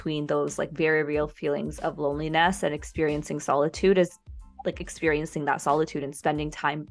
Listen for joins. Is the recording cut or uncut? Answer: uncut